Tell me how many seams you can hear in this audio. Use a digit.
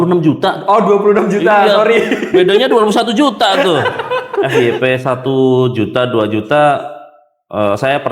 1